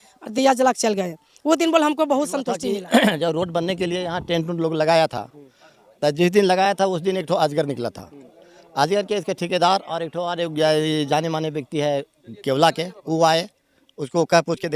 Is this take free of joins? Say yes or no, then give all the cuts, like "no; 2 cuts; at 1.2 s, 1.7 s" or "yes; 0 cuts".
no; 1 cut; at 2.6 s